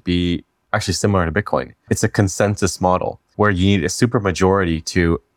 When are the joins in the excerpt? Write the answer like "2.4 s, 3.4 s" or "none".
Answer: 1.9 s, 3.3 s